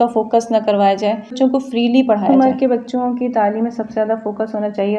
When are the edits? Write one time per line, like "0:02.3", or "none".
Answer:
0:01.3
0:02.3

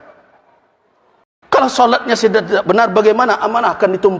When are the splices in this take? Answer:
0:01.4

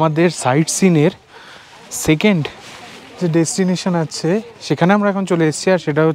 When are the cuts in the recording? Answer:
none

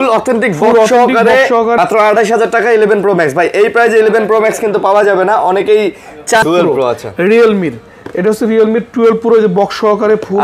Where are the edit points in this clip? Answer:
0:01.8
0:06.4

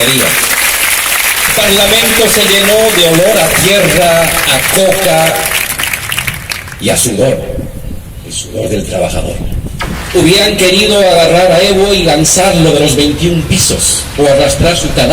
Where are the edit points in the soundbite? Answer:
0:01.5
0:09.9

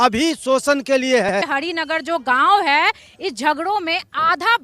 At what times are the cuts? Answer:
0:01.4

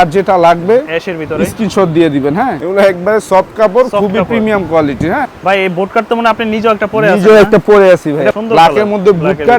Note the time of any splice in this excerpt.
0:02.6
0:05.3
0:08.4

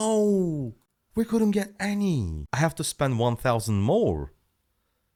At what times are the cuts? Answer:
none

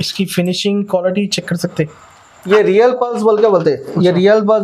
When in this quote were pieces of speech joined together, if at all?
0:02.5

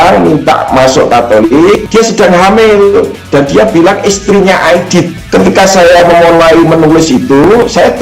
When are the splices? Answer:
0:01.8
0:03.2
0:05.2

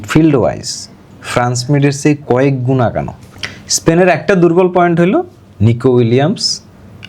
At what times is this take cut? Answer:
0:03.2

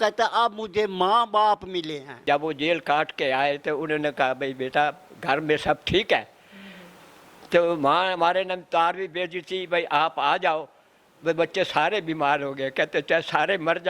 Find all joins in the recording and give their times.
0:02.2

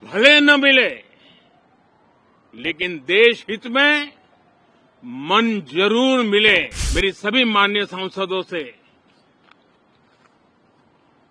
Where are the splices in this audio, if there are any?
0:06.8

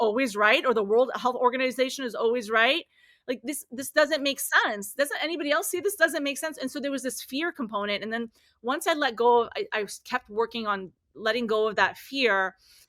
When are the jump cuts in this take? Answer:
none

